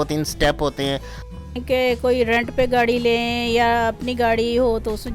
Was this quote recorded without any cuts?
no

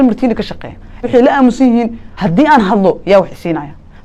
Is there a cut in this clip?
yes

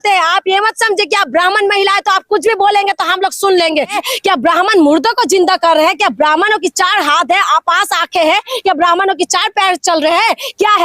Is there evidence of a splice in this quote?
yes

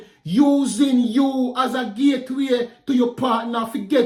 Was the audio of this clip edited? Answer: no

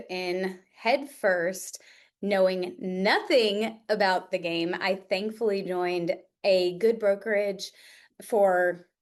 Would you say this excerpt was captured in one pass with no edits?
yes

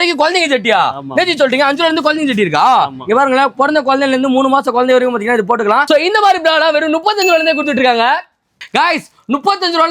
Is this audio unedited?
no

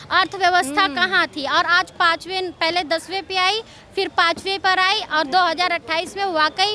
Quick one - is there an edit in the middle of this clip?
no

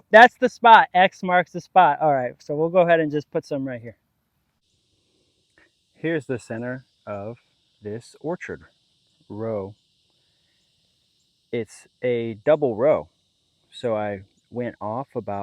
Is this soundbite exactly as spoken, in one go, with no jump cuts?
no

